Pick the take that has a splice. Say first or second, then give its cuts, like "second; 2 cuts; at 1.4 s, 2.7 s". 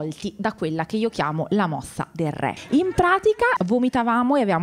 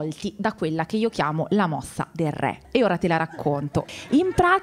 first; 2 cuts; at 2.6 s, 3.6 s